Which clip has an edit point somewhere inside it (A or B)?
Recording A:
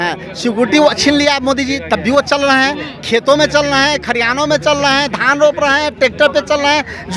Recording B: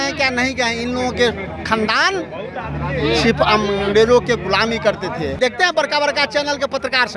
B